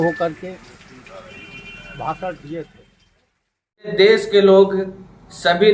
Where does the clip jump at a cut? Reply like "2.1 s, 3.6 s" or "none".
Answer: 3.9 s